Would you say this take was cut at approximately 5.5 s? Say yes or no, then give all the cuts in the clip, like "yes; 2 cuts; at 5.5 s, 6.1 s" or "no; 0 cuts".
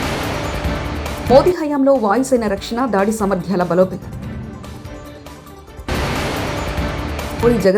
no; 1 cut; at 1.2 s